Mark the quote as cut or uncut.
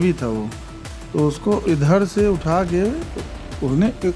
uncut